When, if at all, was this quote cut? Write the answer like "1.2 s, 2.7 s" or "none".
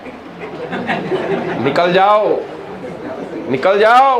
none